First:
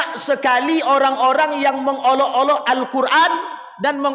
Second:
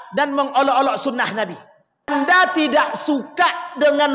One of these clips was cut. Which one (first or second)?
second